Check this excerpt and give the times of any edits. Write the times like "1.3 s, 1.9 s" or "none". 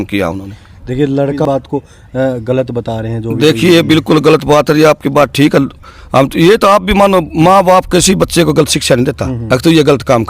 1.4 s